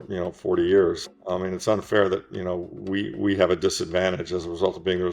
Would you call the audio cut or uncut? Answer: cut